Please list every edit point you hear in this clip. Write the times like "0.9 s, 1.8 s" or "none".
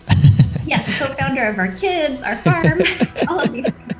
none